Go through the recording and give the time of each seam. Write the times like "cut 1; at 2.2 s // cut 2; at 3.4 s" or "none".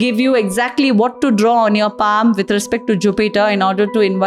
none

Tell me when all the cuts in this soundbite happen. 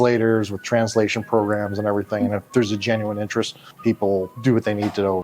cut 1; at 4.3 s

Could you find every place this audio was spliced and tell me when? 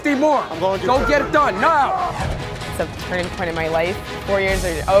cut 1; at 2.1 s // cut 2; at 4.1 s

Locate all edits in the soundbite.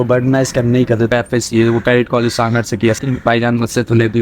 cut 1; at 1.1 s // cut 2; at 3.0 s

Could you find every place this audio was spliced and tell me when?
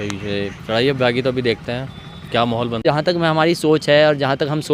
cut 1; at 2.8 s

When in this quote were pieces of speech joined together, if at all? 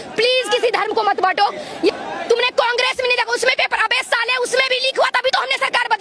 cut 1; at 2.0 s

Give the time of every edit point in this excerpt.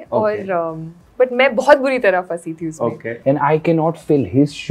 cut 1; at 1.0 s // cut 2; at 3.1 s

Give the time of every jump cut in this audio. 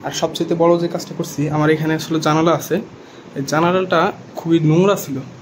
none

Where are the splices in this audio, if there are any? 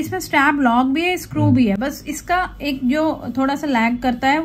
none

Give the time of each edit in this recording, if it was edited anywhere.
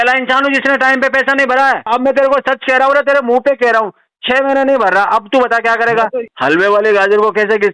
cut 1; at 1.9 s // cut 2; at 6.3 s

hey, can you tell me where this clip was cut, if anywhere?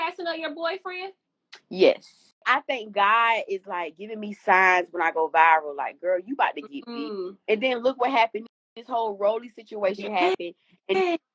cut 1; at 2.4 s

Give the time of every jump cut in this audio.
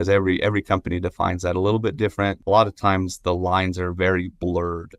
cut 1; at 2.4 s

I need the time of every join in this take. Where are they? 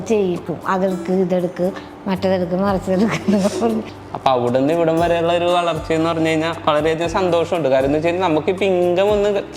cut 1; at 4.0 s

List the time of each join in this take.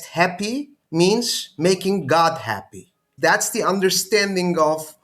cut 1; at 3.0 s

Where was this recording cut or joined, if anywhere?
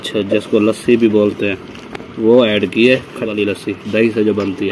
none

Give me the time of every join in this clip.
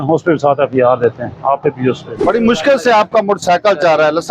cut 1; at 2.2 s

